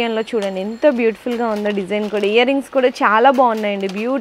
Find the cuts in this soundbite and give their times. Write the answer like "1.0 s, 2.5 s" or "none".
none